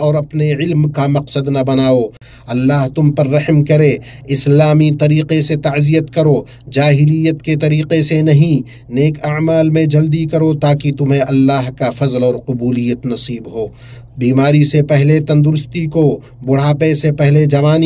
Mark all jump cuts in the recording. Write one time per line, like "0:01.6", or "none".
0:02.2

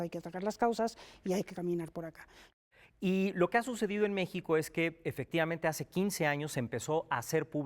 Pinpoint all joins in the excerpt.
0:02.5

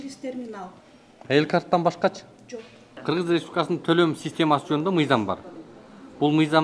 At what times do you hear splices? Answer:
0:03.0

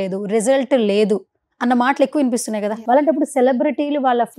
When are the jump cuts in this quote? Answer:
0:02.8

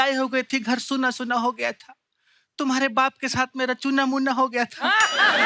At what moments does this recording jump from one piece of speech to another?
none

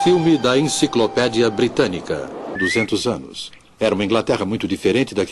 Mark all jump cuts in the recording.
none

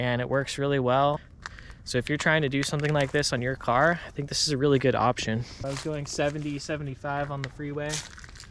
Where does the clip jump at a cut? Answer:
0:01.3
0:05.6

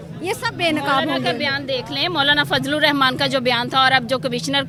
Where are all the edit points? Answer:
none

